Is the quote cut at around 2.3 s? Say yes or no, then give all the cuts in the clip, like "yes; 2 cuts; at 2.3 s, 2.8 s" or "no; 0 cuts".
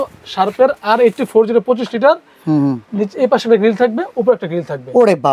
no; 0 cuts